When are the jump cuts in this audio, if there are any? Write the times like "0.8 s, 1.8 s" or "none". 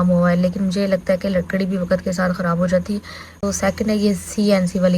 3.4 s